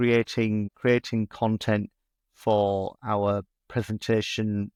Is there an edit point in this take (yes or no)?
no